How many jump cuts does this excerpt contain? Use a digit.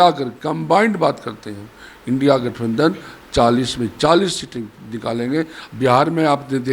1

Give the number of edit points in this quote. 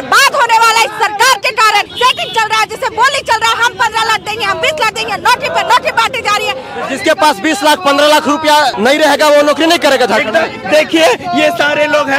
3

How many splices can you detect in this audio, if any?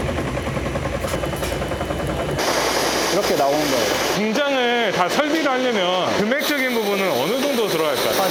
0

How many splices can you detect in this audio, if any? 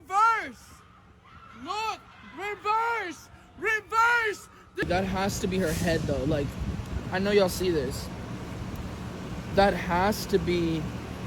1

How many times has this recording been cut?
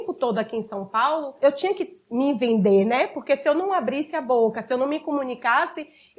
1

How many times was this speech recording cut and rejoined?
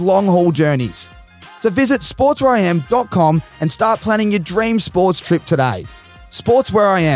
0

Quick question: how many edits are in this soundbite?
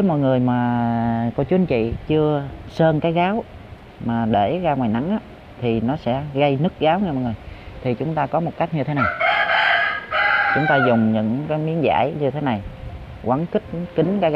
0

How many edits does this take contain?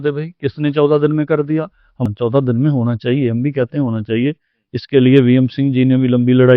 1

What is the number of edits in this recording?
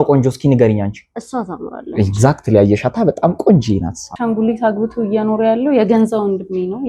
1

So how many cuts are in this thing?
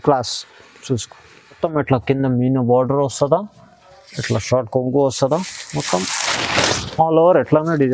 1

